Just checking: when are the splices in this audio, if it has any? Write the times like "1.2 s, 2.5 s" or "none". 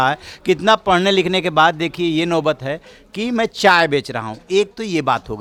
none